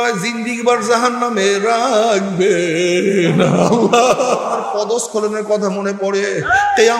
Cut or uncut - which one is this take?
cut